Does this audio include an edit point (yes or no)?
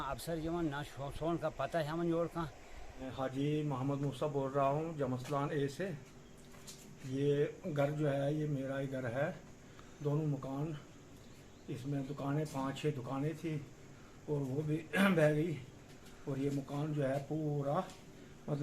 yes